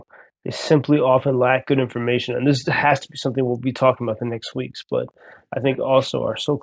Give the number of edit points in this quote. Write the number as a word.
zero